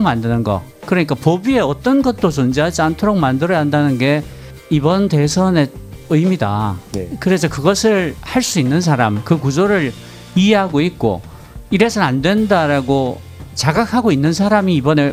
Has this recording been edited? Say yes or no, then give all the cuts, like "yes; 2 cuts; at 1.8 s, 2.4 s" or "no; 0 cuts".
no; 0 cuts